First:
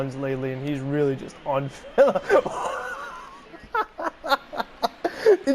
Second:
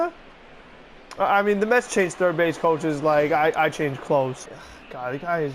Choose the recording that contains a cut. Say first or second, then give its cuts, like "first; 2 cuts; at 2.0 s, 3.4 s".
second; 1 cut; at 4.4 s